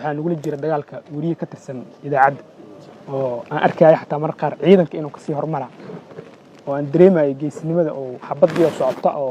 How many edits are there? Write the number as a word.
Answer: zero